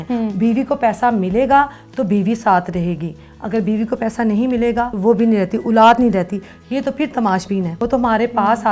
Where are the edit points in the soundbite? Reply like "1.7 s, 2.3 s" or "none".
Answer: none